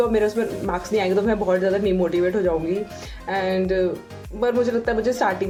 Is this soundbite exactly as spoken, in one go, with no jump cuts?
yes; 0 cuts

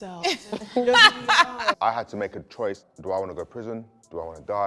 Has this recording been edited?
yes; 2 cuts; at 1.8 s, 2.9 s

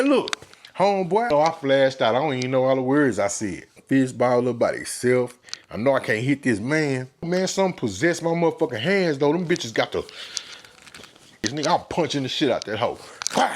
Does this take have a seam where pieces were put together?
yes; 4 cuts; at 1.3 s, 3.7 s, 7.3 s, 11.5 s

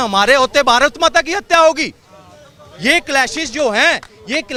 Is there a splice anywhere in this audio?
no; 0 cuts

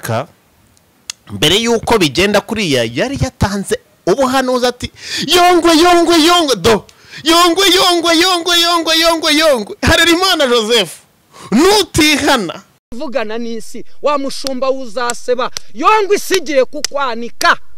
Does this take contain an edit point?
no; 0 cuts

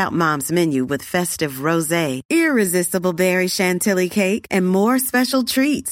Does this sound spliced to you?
no; 0 cuts

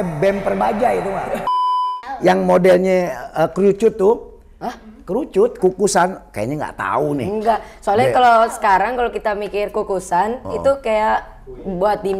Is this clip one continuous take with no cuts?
no; 1 cut; at 1.7 s

